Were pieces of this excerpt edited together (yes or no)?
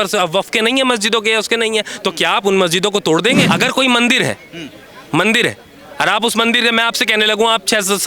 yes